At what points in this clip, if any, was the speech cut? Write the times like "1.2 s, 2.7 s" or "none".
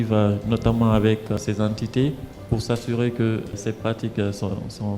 1.4 s, 3.6 s